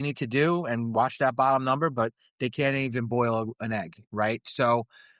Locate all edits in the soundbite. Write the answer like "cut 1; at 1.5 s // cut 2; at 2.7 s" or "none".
none